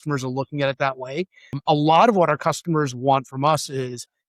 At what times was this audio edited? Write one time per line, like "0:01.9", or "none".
0:01.6